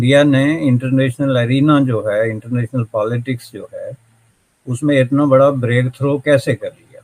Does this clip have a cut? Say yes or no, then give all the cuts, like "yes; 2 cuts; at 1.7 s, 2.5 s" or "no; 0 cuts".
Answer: no; 0 cuts